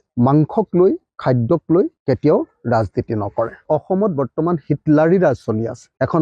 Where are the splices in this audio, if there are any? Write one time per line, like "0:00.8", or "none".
0:03.6

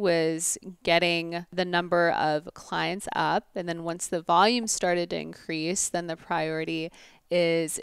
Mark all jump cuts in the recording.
0:01.5

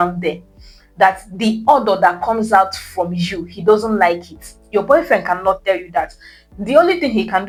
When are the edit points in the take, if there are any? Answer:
none

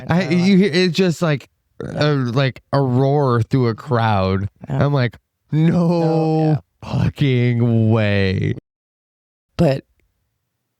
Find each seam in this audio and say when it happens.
0:08.9

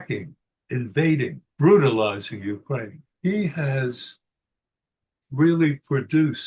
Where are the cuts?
0:01.4
0:03.0

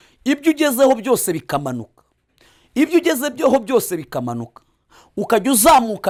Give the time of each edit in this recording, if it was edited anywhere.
none

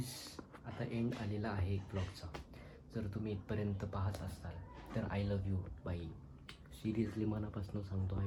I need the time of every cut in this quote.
none

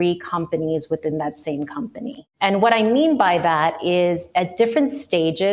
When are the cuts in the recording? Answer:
0:02.2

